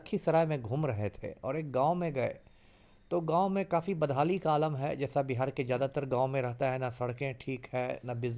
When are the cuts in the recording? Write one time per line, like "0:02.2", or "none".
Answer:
none